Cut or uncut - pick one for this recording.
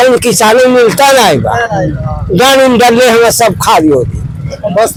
uncut